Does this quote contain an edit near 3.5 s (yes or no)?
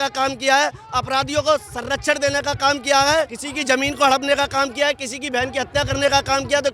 yes